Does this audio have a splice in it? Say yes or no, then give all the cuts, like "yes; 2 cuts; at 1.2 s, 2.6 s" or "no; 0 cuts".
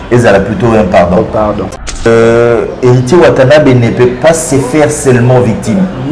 yes; 1 cut; at 2.0 s